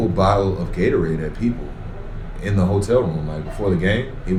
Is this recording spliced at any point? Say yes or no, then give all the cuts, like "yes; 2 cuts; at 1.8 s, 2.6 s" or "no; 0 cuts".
no; 0 cuts